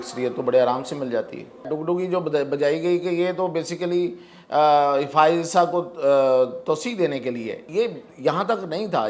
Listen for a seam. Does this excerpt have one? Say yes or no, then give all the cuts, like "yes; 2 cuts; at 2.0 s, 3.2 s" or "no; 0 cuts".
yes; 2 cuts; at 1.7 s, 7.6 s